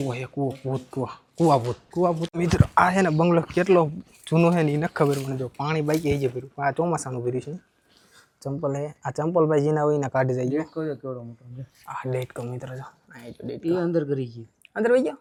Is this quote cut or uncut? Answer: uncut